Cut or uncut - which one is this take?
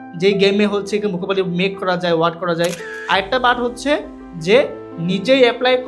cut